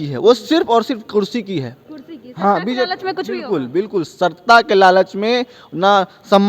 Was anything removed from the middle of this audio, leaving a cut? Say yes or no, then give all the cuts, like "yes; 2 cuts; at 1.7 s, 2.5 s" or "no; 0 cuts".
no; 0 cuts